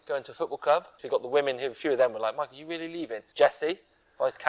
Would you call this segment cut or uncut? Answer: cut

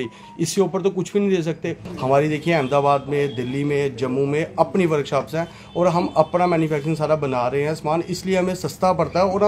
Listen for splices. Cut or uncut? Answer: cut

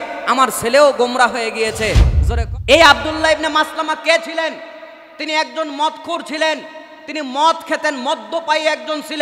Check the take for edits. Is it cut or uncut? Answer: cut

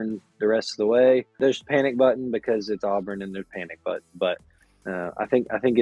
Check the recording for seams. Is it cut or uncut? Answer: cut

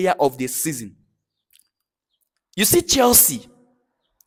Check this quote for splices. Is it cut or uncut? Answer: uncut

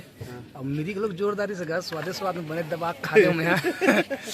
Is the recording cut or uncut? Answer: uncut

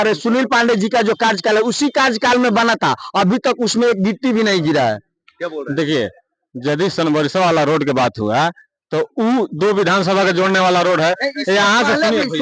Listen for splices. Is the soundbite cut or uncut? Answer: uncut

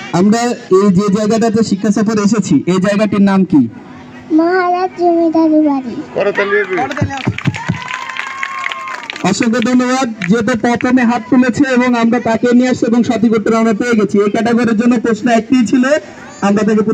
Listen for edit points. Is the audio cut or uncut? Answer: uncut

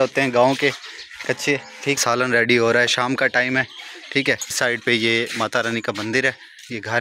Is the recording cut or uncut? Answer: cut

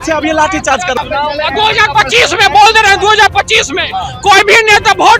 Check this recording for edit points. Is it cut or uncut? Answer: cut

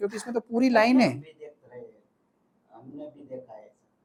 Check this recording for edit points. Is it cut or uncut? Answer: uncut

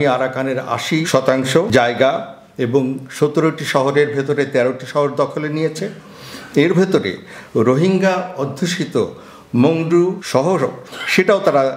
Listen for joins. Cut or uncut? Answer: cut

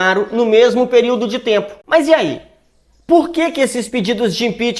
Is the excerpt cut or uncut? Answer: cut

